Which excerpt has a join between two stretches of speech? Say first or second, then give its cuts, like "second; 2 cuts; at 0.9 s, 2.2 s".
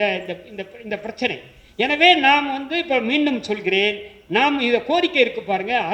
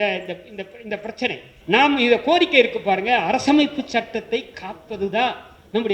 second; 1 cut; at 1.5 s